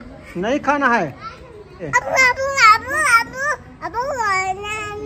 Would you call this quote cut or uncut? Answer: cut